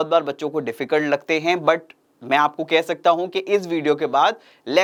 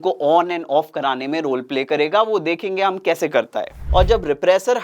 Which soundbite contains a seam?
second; 1 cut; at 3.7 s

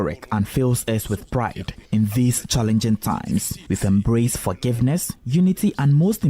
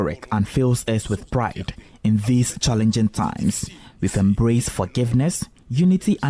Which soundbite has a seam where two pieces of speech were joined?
first; 3 cuts; at 1.7 s, 3.6 s, 5.1 s

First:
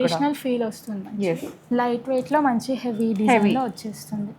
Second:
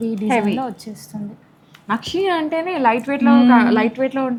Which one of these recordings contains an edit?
first; 1 cut; at 1.5 s

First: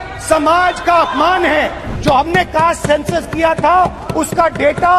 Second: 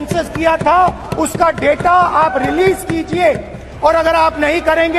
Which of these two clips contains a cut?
first; 1 cut; at 1.9 s

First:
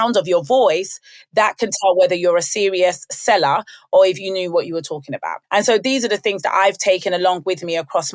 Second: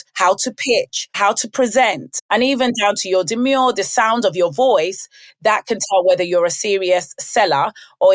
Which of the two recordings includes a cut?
second; 2 cuts; at 1.1 s, 2.1 s

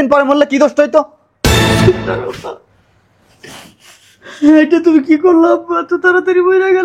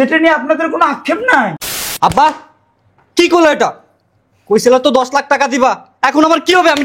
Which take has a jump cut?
second; 1 cut; at 1.6 s

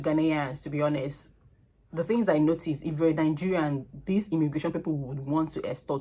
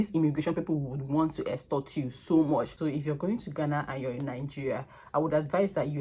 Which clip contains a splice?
second; 1 cut; at 2.9 s

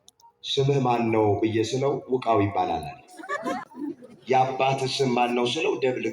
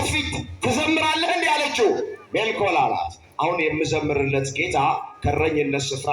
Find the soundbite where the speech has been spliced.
first; 1 cut; at 3.6 s

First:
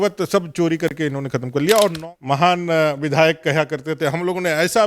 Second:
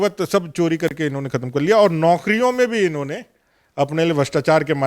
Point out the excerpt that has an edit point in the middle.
first; 1 cut; at 2.0 s

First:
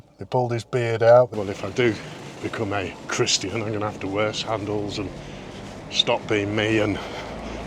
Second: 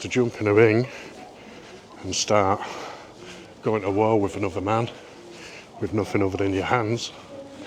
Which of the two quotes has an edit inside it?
first; 1 cut; at 1.3 s

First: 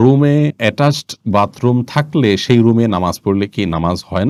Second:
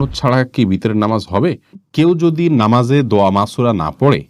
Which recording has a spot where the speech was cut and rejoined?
second; 1 cut; at 1.8 s

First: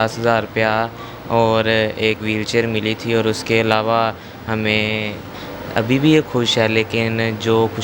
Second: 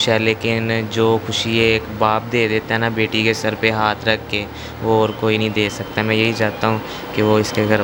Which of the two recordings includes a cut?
first; 1 cut; at 5.4 s

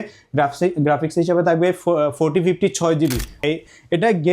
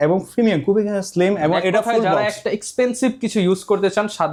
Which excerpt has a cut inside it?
first; 1 cut; at 3.4 s

